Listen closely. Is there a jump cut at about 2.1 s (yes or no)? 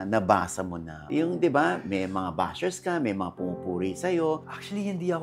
no